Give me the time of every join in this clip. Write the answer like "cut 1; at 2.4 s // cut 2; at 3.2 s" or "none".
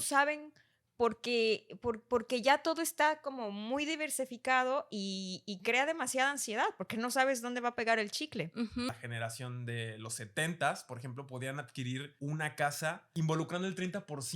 cut 1; at 8.9 s // cut 2; at 12.1 s // cut 3; at 13.0 s